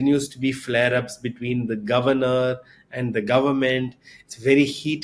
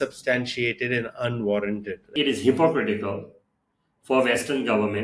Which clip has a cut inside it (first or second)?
second